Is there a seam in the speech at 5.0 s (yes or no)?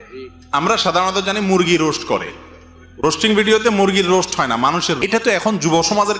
yes